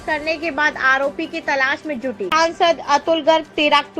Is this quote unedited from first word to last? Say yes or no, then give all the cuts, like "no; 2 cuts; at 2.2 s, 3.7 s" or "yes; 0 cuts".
no; 1 cut; at 2.3 s